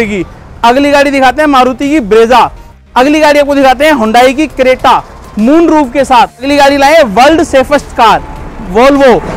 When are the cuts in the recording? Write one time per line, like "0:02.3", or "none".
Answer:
0:02.7
0:06.4